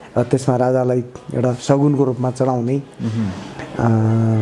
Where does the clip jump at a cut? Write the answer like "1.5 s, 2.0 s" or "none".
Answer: none